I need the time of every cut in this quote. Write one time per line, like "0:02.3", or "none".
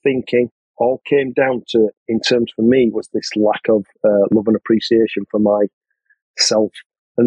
none